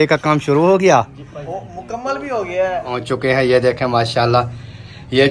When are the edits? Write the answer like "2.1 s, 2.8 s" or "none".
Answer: 3.1 s